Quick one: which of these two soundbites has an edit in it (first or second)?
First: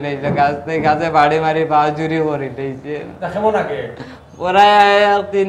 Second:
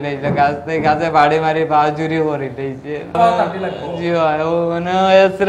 second